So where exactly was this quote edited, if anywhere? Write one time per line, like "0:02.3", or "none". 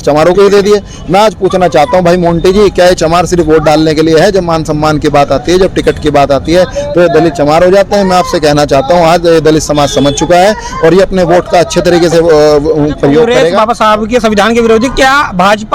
0:13.6